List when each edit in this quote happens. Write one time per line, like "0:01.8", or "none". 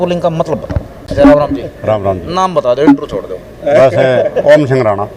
0:01.0